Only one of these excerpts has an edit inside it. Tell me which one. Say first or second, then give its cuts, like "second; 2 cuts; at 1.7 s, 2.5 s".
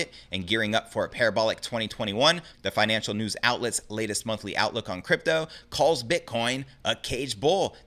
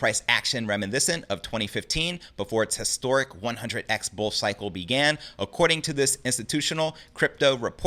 first; 1 cut; at 2.5 s